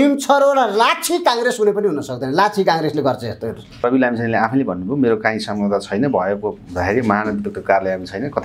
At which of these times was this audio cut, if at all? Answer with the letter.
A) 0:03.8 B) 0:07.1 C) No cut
A